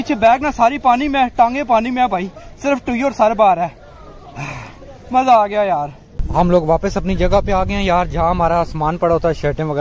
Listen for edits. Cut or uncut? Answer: uncut